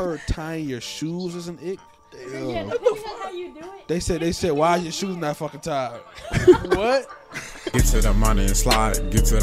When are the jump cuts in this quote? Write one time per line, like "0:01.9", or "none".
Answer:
0:07.6